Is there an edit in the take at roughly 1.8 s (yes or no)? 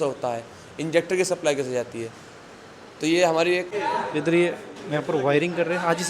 no